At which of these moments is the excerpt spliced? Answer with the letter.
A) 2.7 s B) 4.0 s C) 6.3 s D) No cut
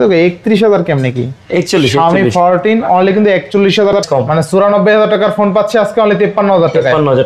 B